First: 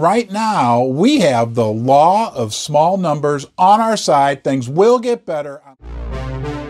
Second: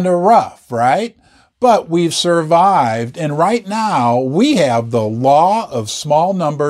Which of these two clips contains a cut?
first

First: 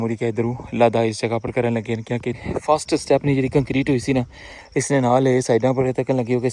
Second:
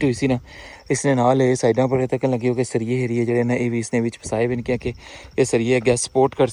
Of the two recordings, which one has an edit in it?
first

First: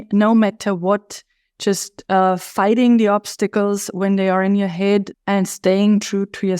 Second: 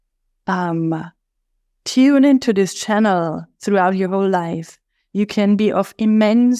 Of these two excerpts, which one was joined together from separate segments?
first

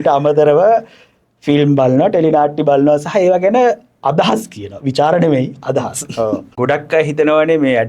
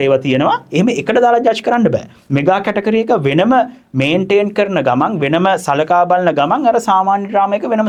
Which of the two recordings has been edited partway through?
first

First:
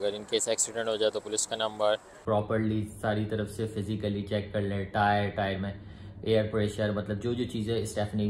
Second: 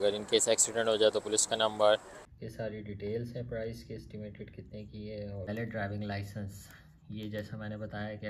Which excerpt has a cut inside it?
second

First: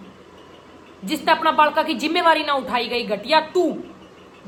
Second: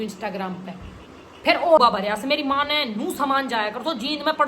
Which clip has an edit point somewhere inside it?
second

